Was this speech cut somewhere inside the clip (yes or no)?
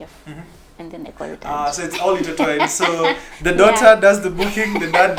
no